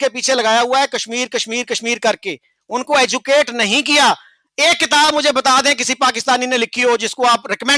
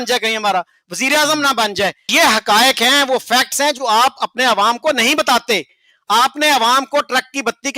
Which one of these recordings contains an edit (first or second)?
second